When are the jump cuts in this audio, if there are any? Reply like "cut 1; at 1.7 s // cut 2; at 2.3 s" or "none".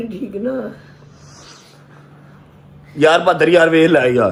none

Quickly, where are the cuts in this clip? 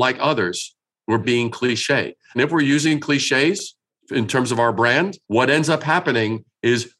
cut 1; at 1.2 s // cut 2; at 5.2 s

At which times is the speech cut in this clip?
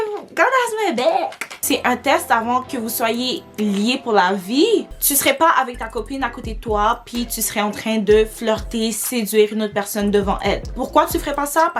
cut 1; at 1.5 s // cut 2; at 4.9 s // cut 3; at 10.8 s

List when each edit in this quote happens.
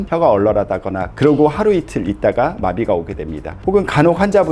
cut 1; at 1.1 s

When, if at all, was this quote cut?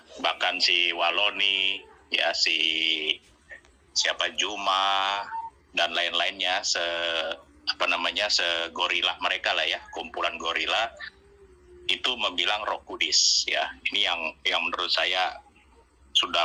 none

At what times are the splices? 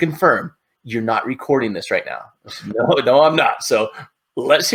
none

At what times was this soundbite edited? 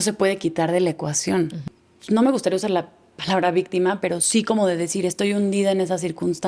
cut 1; at 1.6 s

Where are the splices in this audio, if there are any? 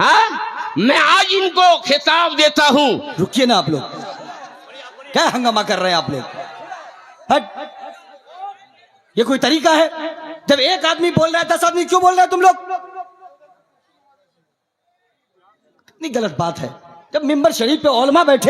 cut 1; at 3.1 s

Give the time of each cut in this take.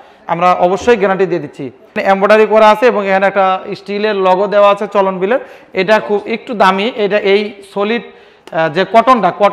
cut 1; at 2.0 s

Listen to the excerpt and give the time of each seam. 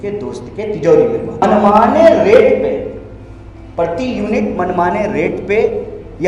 cut 1; at 1.4 s

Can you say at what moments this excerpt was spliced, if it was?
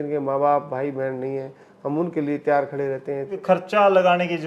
cut 1; at 3.3 s

